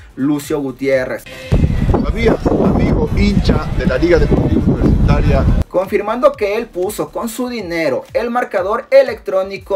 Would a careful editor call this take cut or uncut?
cut